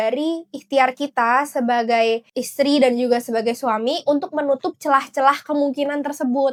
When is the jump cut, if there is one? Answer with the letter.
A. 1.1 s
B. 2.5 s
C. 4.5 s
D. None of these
D